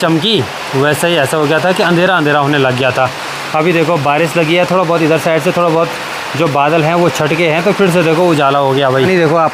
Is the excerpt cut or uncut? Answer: uncut